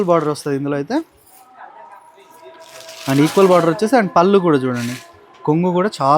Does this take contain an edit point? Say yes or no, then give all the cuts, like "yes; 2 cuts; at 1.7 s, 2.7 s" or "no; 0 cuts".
no; 0 cuts